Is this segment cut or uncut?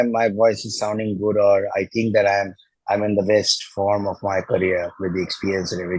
uncut